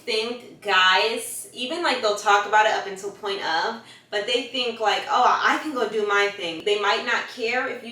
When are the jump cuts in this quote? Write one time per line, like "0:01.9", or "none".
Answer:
0:06.6